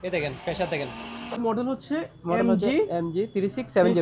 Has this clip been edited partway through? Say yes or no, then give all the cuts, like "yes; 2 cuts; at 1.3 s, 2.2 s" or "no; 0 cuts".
yes; 1 cut; at 1.3 s